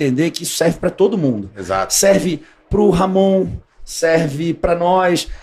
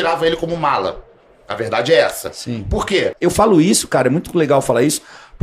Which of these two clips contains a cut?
second; 1 cut; at 3.1 s

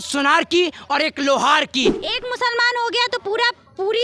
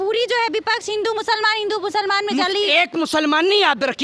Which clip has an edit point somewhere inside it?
first; 1 cut; at 2.0 s

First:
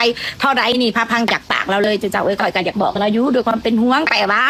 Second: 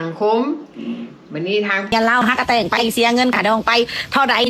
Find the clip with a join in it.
second; 1 cut; at 1.9 s

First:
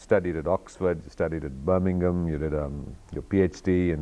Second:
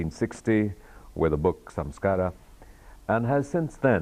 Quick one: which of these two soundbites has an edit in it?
first; 1 cut; at 2.3 s

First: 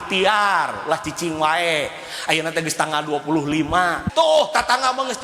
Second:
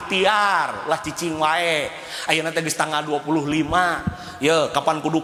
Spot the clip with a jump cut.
first; 1 cut; at 4.0 s

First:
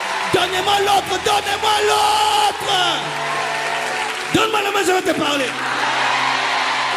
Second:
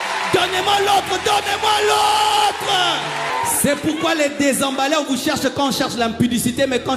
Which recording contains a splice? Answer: second; 1 cut; at 3.3 s

